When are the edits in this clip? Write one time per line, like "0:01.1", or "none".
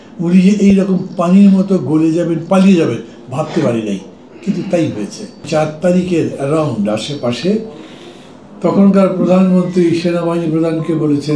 0:05.5